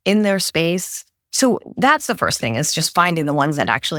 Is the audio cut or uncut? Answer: uncut